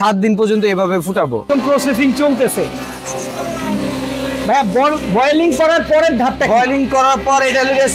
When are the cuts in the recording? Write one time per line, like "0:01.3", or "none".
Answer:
0:01.5